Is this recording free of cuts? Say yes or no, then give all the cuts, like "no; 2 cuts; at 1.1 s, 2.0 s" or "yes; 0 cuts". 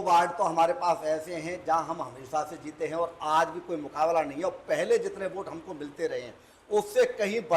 yes; 0 cuts